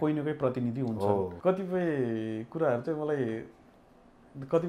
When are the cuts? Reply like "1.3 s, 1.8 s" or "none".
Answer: 1.4 s